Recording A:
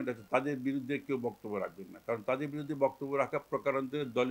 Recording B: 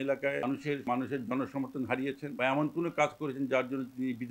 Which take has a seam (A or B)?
B